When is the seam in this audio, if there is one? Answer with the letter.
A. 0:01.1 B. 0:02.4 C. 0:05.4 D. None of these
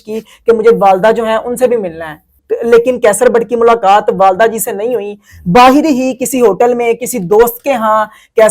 B